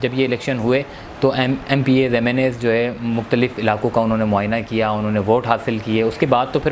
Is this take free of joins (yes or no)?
yes